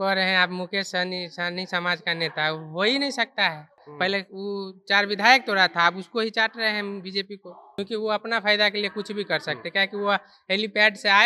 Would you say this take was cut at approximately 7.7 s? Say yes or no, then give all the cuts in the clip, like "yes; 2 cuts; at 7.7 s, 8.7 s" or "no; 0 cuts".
yes; 2 cuts; at 3.8 s, 7.7 s